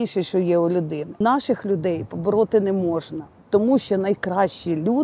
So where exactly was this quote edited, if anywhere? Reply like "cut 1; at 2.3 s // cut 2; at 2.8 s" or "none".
cut 1; at 1.0 s